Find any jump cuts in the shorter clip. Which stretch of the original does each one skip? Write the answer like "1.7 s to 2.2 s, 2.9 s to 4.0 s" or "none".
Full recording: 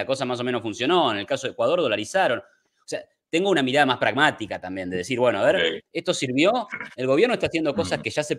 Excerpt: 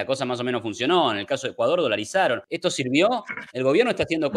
2.5 s to 5.9 s